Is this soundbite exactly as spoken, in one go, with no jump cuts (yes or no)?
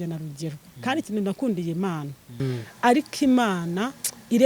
no